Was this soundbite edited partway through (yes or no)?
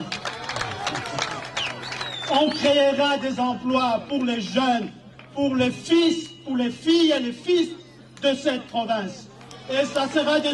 no